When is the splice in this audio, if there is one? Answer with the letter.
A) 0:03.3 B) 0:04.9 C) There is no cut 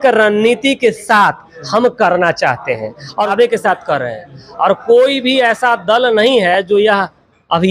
A